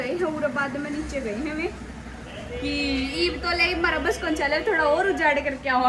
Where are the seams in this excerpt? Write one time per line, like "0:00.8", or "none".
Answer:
none